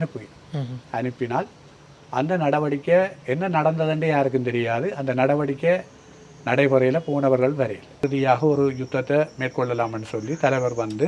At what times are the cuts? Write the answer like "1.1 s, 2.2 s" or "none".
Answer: 8.0 s